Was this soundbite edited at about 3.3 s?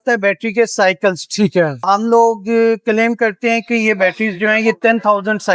no; 1 cut; at 1.9 s

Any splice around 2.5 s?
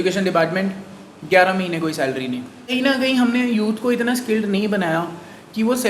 yes; 1 cut; at 2.5 s

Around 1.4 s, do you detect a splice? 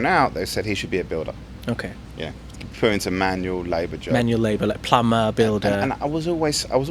no; 0 cuts

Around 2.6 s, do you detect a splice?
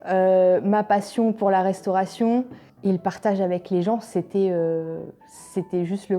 yes; 1 cut; at 2.6 s

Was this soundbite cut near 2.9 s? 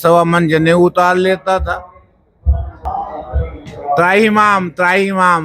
yes; 1 cut; at 2.9 s

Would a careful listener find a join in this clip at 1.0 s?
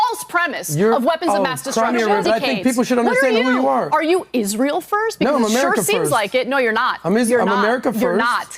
no; 1 cut; at 2.2 s

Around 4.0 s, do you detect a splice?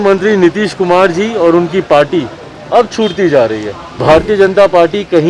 yes; 1 cut; at 4.0 s

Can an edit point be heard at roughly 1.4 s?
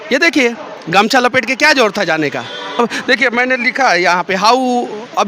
no; 1 cut; at 2.8 s

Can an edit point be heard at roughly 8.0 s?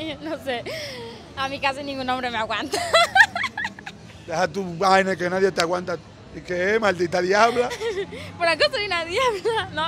no; 0 cuts

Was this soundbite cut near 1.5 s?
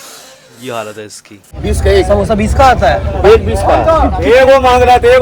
yes; 1 cut; at 1.5 s

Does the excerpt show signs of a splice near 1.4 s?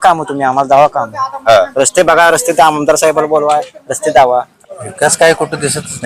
no; 1 cut; at 4.5 s

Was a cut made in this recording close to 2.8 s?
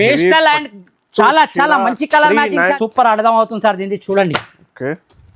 yes; 1 cut; at 2.8 s

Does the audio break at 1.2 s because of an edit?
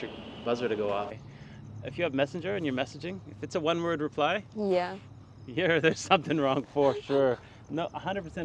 yes; 1 cut; at 1.2 s

